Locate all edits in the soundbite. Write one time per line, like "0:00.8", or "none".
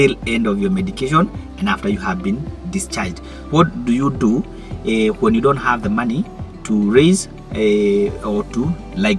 0:03.4